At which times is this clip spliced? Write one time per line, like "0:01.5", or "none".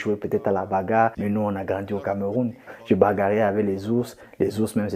0:01.2
0:02.6